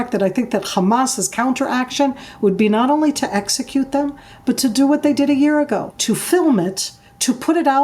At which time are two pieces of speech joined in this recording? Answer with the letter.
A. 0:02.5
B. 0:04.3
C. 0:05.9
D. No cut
C